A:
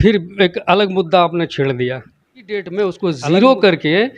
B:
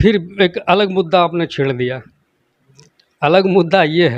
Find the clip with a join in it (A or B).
A